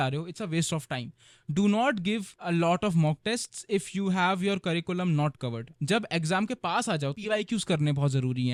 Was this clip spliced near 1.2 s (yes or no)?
no